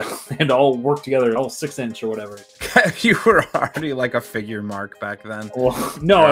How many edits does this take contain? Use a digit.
1